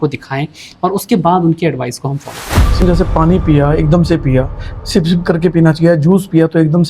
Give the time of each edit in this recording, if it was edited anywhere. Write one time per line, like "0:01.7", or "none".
0:02.8